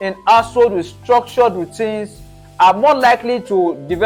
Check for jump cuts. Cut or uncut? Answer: uncut